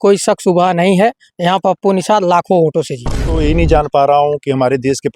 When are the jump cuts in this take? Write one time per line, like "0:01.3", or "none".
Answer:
0:03.3